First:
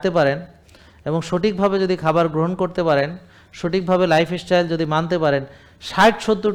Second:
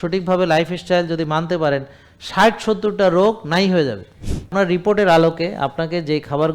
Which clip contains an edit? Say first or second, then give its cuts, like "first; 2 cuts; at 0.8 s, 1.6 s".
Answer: second; 1 cut; at 4.5 s